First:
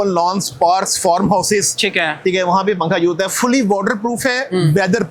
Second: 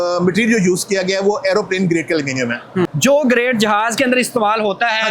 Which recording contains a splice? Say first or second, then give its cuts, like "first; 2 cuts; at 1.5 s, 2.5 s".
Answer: second; 1 cut; at 2.9 s